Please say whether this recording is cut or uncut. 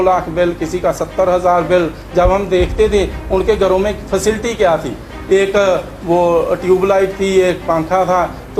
uncut